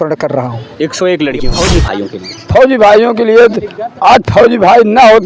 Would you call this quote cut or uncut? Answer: cut